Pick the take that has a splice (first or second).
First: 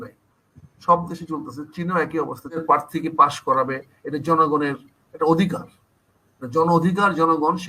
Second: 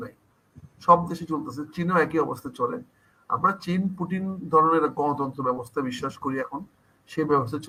first